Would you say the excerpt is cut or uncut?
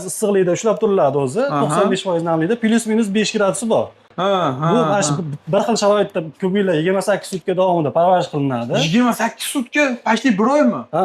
uncut